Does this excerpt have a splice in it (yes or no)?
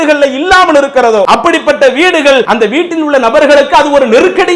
yes